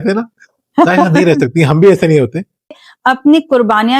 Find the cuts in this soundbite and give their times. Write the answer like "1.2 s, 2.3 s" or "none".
2.8 s